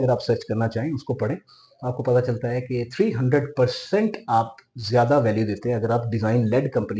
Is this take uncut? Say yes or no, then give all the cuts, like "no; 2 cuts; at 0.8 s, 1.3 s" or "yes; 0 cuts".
yes; 0 cuts